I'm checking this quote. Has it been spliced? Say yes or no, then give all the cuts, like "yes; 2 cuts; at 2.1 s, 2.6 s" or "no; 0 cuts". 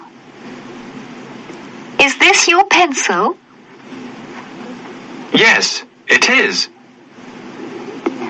yes; 1 cut; at 5.2 s